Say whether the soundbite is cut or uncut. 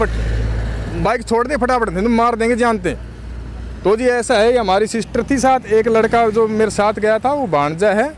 uncut